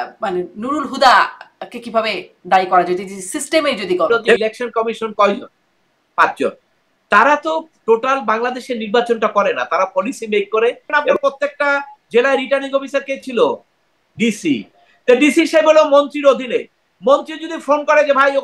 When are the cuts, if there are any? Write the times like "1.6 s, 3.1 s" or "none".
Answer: 4.4 s, 11.1 s